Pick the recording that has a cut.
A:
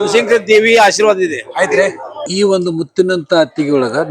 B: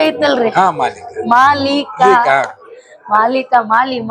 A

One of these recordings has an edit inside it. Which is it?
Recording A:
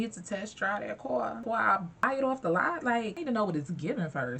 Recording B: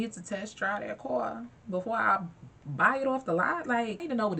A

